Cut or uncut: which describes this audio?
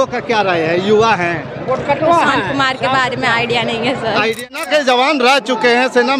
cut